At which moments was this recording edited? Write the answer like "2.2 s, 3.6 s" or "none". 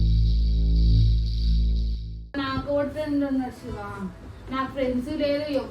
2.3 s